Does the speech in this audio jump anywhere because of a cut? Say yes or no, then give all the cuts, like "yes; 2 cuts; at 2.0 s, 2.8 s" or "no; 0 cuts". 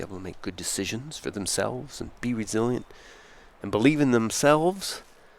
no; 0 cuts